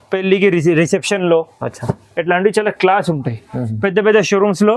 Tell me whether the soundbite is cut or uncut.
uncut